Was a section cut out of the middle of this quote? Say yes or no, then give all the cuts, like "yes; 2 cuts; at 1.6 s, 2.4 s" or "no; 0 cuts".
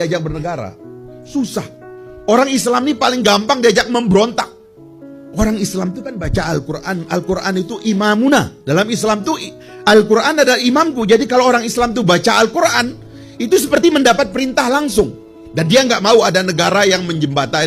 no; 0 cuts